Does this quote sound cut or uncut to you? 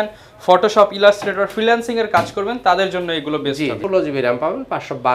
cut